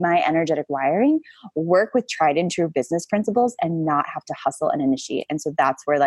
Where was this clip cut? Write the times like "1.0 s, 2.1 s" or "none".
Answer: none